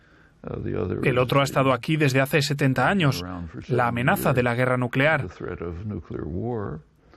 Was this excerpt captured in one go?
no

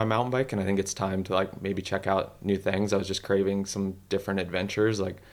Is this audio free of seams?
yes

